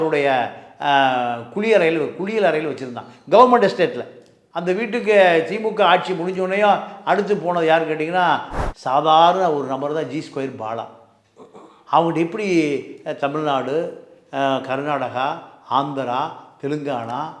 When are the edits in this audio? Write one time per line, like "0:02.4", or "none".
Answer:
0:08.5